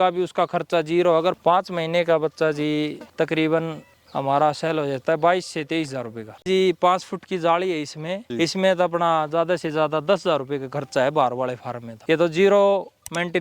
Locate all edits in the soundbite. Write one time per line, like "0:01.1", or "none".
0:01.4
0:06.5